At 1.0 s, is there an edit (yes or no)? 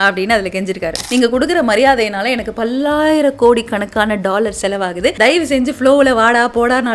yes